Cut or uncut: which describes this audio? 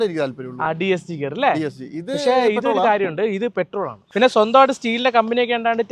cut